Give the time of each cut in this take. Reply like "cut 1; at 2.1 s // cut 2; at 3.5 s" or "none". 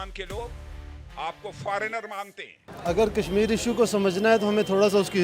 cut 1; at 2.7 s